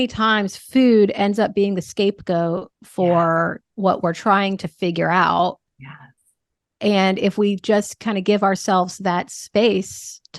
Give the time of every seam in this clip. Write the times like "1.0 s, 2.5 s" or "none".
none